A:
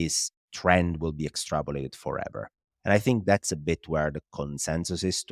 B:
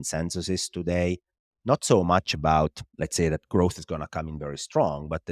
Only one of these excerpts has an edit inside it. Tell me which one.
B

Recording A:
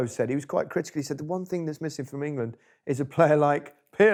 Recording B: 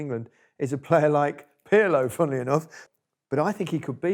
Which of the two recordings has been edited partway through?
B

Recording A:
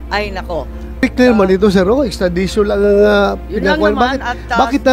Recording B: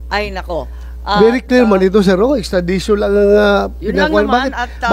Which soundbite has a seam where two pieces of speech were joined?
A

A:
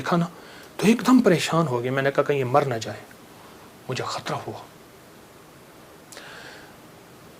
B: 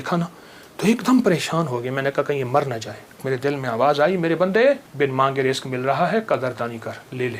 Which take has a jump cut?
B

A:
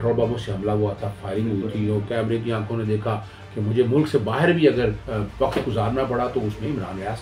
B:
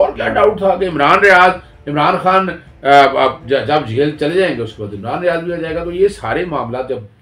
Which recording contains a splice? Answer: A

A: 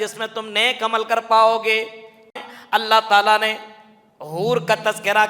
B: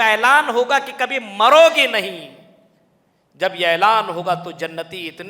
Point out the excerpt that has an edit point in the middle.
A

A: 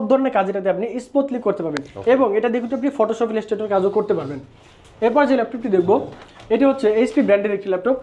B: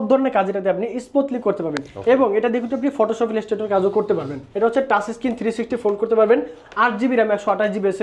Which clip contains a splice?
B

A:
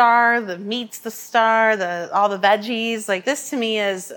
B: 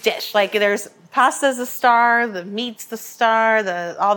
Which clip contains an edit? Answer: A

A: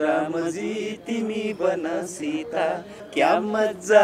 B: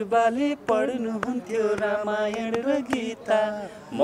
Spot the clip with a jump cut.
A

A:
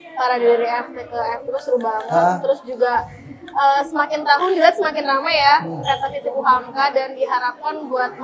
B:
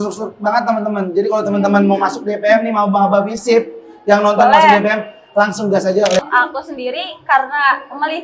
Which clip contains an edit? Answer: B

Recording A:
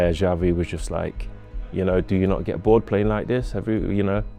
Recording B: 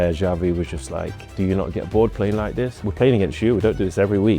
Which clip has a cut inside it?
B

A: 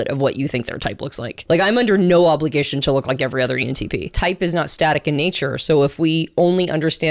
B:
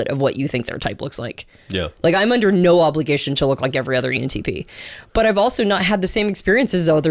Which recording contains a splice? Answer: A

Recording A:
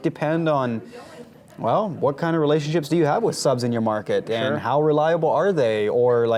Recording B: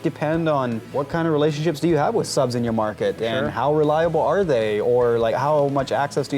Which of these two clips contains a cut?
B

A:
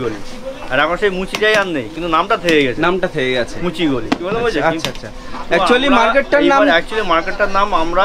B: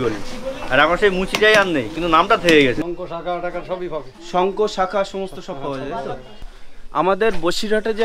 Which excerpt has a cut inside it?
B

